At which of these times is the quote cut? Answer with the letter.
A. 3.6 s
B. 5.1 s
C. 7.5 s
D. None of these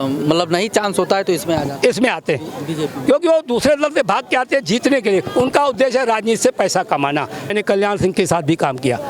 C